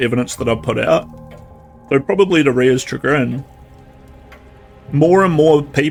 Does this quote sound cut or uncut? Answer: uncut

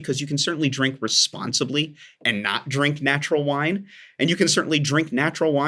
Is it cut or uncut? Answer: uncut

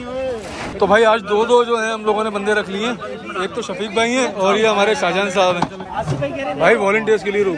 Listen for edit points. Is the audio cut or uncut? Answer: cut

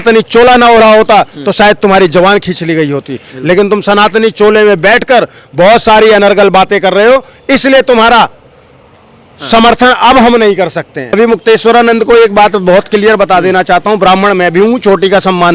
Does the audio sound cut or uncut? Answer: cut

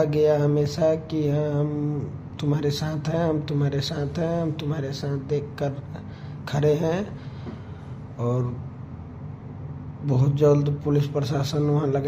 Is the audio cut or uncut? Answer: uncut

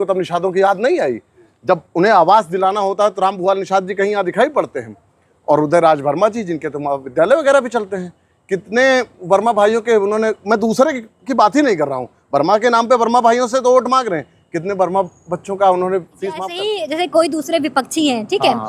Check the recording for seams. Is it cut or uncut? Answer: cut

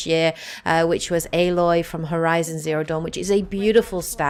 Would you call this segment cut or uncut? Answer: uncut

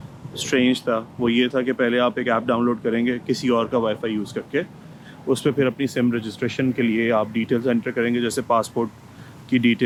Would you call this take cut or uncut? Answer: uncut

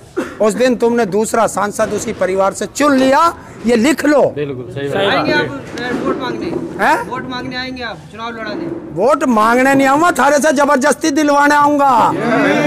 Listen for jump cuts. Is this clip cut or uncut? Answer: uncut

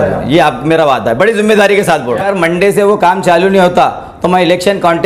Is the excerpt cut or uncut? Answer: cut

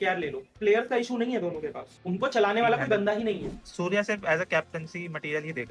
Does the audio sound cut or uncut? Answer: cut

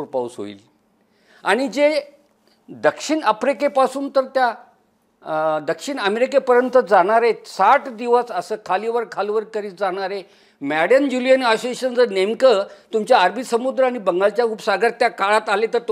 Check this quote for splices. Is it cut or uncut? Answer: uncut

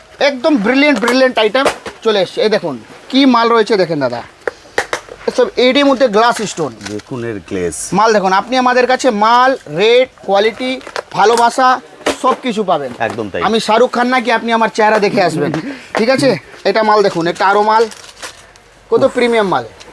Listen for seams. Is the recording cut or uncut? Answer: uncut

